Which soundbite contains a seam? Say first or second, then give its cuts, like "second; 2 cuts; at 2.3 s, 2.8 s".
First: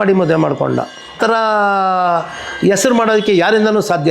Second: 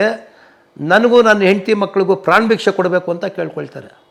first; 1 cut; at 1.2 s